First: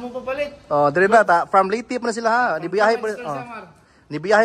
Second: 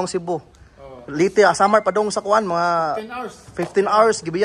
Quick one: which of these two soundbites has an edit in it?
first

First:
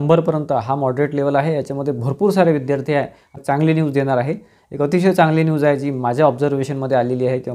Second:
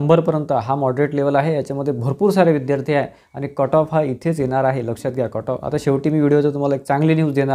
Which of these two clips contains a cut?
first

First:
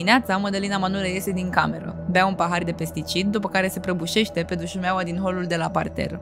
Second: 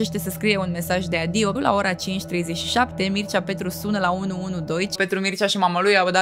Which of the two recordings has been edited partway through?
second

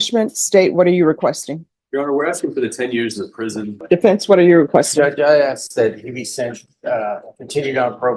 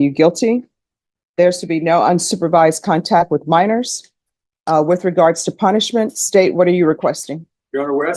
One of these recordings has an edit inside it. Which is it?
first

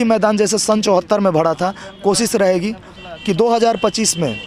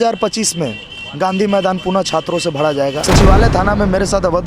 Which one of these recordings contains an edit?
second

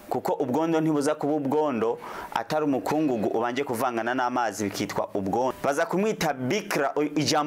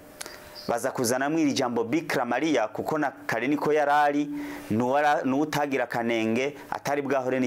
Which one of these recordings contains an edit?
first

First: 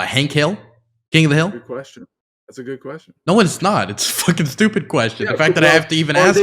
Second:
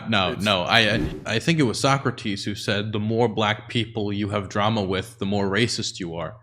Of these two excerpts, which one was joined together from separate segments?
second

